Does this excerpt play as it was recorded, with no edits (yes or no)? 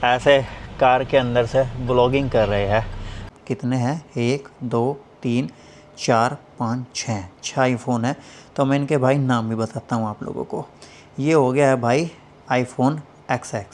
no